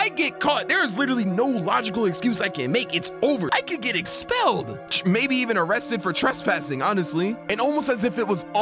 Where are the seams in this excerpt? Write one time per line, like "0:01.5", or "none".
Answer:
0:03.5